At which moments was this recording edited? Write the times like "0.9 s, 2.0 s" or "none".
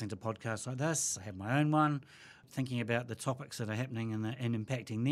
2.4 s